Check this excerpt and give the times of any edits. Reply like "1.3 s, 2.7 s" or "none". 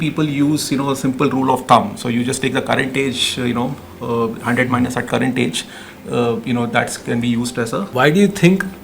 7.9 s